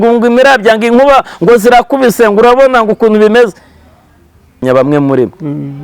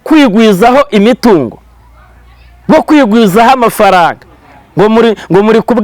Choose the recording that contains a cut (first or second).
first